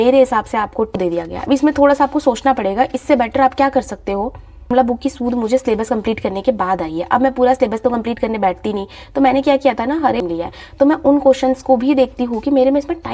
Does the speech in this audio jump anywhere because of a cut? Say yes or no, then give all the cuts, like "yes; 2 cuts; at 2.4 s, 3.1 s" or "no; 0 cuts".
yes; 3 cuts; at 1.0 s, 4.7 s, 10.3 s